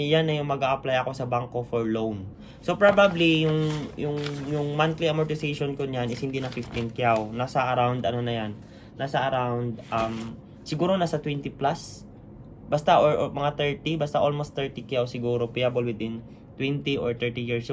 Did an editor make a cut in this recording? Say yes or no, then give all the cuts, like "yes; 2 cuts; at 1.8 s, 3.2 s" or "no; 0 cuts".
no; 0 cuts